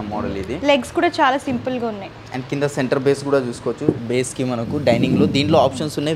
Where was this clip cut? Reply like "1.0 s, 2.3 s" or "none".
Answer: none